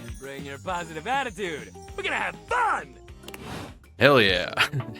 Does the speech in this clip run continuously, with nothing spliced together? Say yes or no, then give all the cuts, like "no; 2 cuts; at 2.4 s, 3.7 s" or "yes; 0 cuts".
yes; 0 cuts